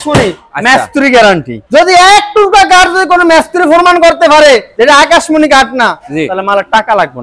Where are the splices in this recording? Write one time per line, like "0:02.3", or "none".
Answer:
0:04.7

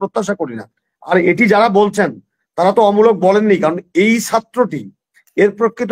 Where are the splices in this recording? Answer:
none

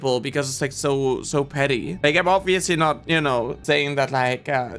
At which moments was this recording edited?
0:01.9
0:03.6

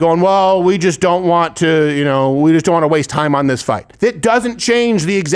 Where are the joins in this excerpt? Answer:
0:03.9

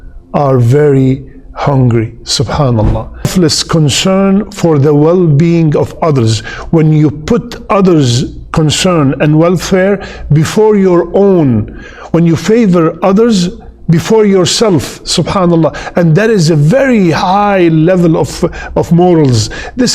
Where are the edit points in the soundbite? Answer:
0:03.3

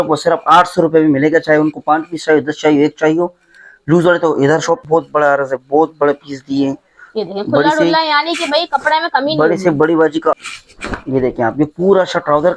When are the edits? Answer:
0:04.8
0:10.4

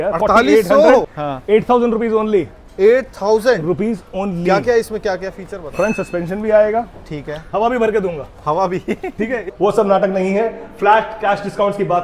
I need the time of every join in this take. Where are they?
0:01.1
0:09.4

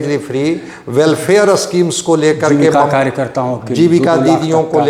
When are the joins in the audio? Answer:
none

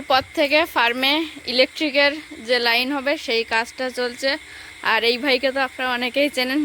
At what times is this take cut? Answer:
none

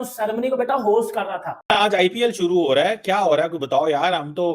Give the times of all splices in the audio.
0:01.5

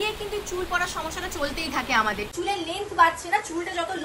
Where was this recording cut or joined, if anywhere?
0:02.3

